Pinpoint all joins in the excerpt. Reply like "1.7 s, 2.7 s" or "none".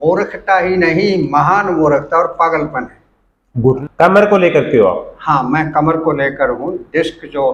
3.8 s